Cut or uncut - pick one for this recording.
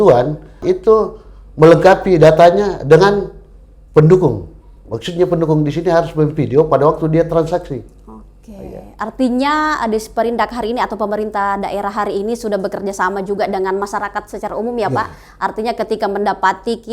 uncut